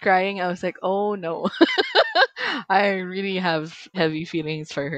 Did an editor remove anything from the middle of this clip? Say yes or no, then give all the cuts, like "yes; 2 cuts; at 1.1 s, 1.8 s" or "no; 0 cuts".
yes; 1 cut; at 3.8 s